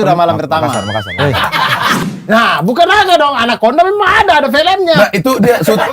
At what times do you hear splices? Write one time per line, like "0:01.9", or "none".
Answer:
0:02.0